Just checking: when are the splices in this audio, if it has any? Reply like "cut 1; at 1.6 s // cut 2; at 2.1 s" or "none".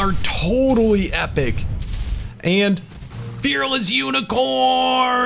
cut 1; at 2.2 s